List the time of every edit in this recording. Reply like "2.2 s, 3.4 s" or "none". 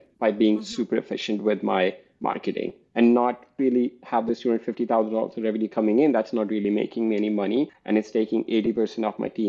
none